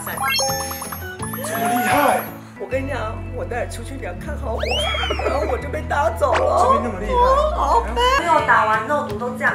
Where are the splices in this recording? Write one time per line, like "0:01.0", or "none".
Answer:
0:02.5
0:08.2